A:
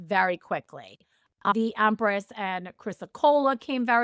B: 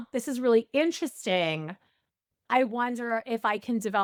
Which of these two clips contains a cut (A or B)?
A